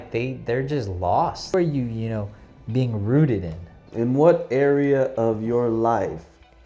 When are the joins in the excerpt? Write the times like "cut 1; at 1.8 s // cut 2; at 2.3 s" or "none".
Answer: cut 1; at 1.5 s // cut 2; at 3.8 s

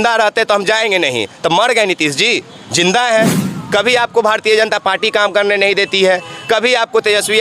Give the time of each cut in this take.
cut 1; at 3.5 s

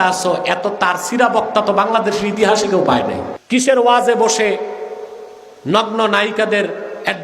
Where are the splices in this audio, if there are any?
cut 1; at 3.3 s

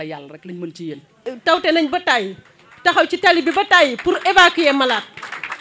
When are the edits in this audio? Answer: cut 1; at 1.2 s

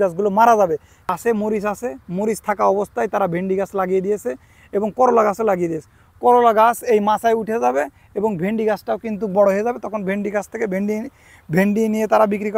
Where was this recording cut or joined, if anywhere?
cut 1; at 1.1 s

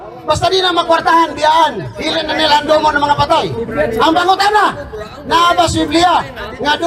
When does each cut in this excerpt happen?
none

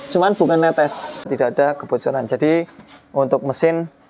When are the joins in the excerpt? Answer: cut 1; at 1.3 s

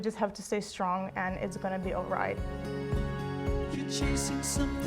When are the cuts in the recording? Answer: cut 1; at 2.4 s

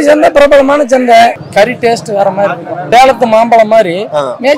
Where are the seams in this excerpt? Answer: cut 1; at 1.4 s // cut 2; at 2.7 s

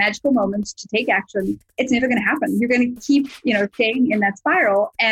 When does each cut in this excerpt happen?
cut 1; at 3.7 s

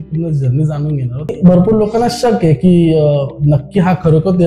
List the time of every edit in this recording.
cut 1; at 1.3 s

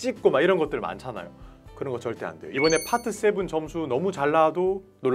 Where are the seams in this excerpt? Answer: cut 1; at 2.4 s

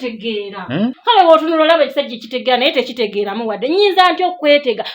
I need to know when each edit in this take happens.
cut 1; at 1.0 s

